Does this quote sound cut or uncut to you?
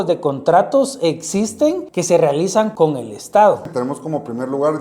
cut